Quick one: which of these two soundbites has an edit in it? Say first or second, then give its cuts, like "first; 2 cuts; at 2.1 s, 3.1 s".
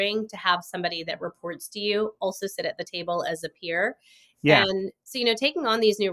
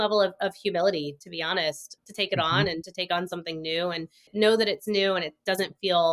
second; 2 cuts; at 1.9 s, 4.2 s